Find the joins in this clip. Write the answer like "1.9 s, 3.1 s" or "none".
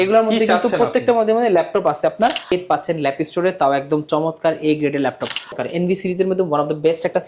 2.5 s, 5.5 s